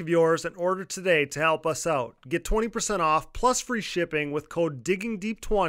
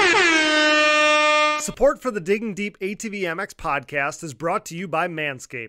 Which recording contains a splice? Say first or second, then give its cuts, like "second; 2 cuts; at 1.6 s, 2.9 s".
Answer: second; 1 cut; at 1.7 s